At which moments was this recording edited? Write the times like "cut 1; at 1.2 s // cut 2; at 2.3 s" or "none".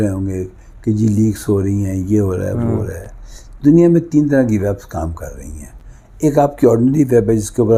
none